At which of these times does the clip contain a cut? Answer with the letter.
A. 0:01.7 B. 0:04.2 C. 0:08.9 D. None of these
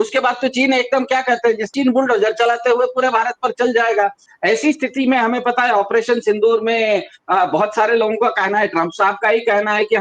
A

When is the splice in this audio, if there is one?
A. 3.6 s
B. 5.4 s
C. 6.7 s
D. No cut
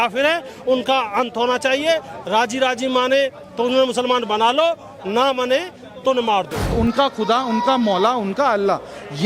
C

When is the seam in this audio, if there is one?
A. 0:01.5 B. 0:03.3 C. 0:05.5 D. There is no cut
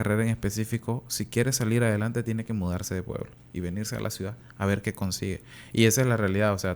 C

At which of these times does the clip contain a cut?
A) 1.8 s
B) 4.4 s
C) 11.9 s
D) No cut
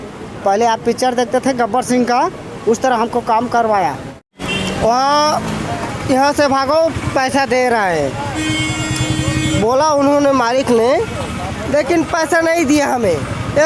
B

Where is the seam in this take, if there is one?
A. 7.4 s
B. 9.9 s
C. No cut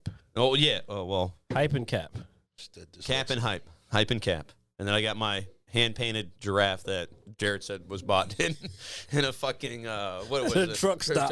C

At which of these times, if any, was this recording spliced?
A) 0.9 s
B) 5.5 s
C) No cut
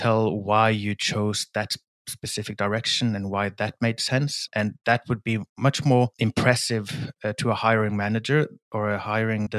B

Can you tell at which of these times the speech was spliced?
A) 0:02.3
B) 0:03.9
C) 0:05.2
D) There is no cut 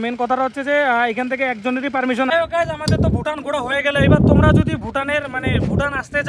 A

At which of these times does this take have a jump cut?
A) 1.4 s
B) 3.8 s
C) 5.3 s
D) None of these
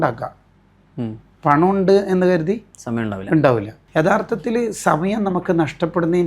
B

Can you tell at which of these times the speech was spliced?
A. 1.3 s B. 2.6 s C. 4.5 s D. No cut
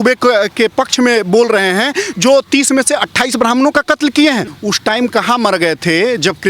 C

